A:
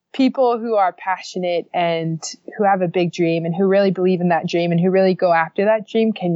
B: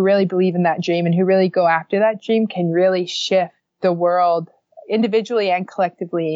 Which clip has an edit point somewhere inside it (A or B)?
B